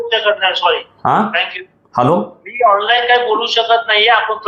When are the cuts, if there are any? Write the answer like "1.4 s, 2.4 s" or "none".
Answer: none